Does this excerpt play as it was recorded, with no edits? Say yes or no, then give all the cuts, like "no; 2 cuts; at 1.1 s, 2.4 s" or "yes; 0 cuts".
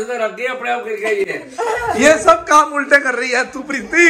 yes; 0 cuts